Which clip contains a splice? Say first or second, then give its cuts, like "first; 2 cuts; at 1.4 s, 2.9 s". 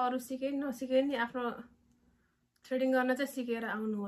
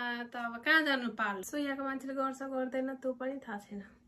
second; 1 cut; at 1.4 s